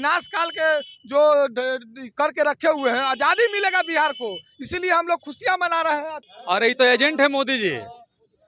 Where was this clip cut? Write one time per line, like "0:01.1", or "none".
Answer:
0:06.3